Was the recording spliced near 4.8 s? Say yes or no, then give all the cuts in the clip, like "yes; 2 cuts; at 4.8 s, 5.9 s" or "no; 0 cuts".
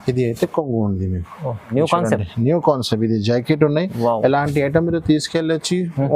no; 1 cut; at 1.7 s